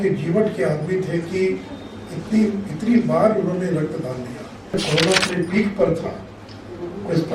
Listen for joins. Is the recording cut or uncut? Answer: cut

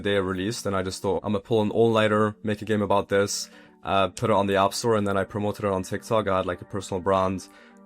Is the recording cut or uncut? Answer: cut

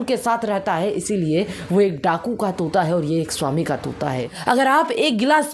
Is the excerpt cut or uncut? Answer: cut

